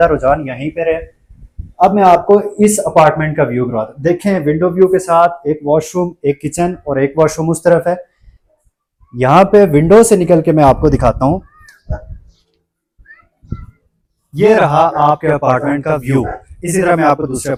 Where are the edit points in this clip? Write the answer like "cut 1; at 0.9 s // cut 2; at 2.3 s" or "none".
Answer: none